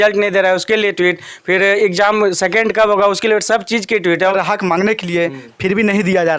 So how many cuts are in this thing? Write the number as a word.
one